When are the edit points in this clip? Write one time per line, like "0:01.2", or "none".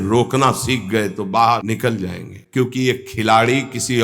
0:02.2